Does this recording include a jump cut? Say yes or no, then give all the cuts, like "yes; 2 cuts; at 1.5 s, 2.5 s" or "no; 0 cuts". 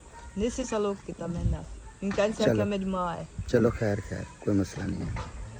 no; 0 cuts